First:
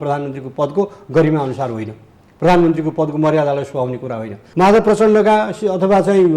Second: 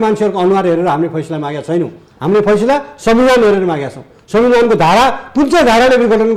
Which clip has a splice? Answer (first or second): first